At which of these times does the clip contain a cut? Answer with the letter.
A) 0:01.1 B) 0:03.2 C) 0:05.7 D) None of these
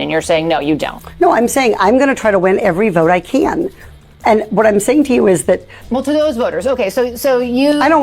C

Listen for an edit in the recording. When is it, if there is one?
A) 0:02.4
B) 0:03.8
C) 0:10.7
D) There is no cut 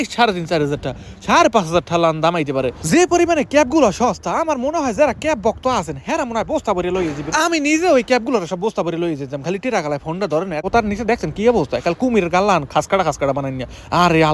C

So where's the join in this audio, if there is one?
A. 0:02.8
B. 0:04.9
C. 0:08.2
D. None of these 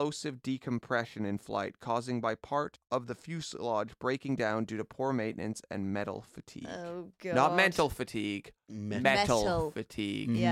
A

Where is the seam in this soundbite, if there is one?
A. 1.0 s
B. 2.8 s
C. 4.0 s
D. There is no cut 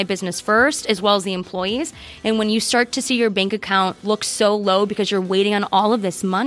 C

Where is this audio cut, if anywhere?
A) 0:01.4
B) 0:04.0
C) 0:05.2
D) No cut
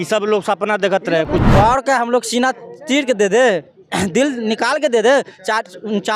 A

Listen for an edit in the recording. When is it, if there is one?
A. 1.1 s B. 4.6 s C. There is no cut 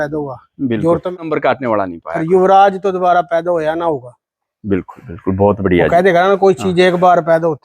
A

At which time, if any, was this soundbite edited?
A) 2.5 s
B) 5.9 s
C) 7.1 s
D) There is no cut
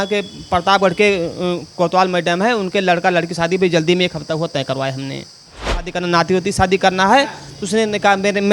B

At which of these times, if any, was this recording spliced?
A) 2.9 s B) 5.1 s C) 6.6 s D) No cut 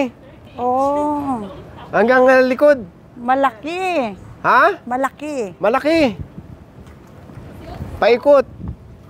D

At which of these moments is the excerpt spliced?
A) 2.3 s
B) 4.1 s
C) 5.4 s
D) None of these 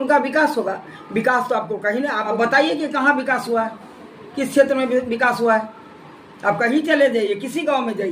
A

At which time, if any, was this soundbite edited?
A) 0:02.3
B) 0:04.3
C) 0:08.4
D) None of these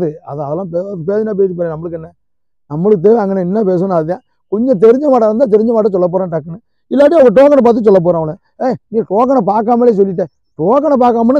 D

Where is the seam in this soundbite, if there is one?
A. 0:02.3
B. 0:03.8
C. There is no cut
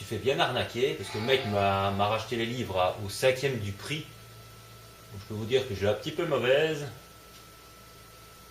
A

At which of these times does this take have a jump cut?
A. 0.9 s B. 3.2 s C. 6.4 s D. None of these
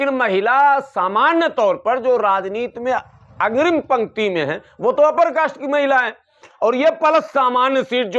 C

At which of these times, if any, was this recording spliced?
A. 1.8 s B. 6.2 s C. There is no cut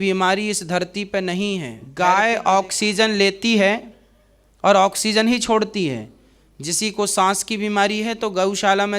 A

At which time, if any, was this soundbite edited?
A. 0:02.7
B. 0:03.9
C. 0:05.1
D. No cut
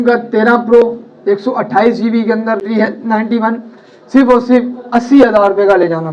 A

